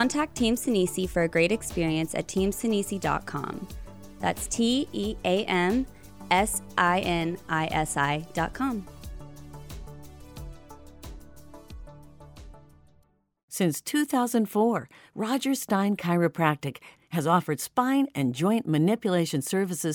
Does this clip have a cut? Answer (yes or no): yes